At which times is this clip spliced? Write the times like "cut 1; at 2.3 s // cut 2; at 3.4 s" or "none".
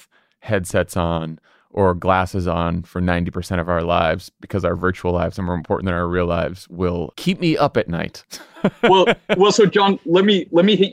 cut 1; at 7.1 s

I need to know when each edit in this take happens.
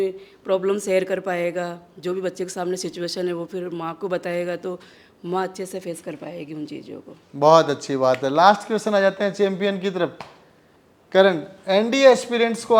none

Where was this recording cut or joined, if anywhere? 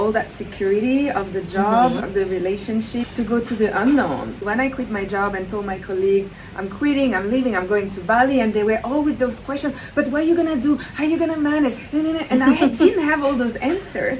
cut 1; at 4.4 s

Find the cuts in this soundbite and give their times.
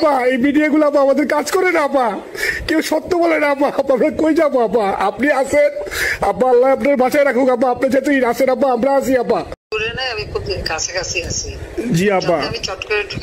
cut 1; at 9.7 s // cut 2; at 11.6 s

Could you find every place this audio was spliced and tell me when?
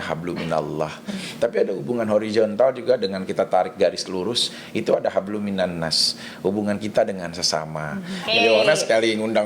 cut 1; at 1.2 s // cut 2; at 8.2 s

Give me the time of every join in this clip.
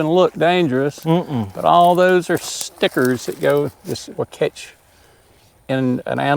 none

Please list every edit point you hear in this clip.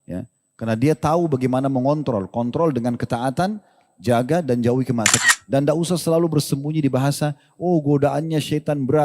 cut 1; at 5.3 s

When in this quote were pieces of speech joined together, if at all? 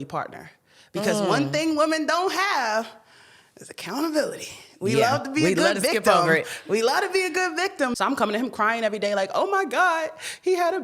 cut 1; at 8.0 s

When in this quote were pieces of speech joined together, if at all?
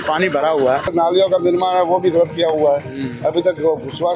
cut 1; at 0.9 s

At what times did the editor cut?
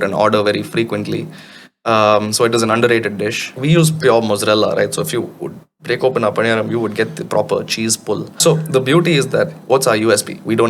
cut 1; at 3.6 s // cut 2; at 8.3 s

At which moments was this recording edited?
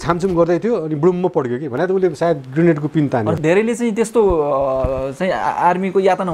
none

